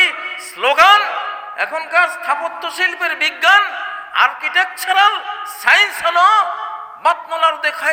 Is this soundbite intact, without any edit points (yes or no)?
yes